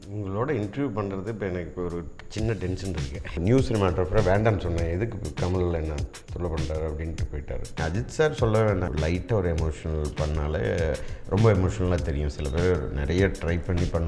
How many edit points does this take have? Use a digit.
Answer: 3